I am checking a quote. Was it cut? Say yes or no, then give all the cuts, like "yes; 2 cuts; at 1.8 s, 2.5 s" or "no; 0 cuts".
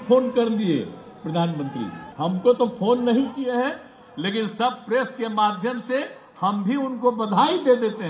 yes; 1 cut; at 2.0 s